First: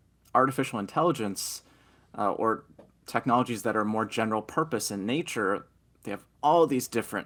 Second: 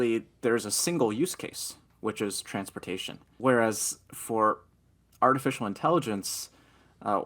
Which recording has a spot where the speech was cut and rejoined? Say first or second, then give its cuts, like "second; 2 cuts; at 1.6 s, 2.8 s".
second; 1 cut; at 3.4 s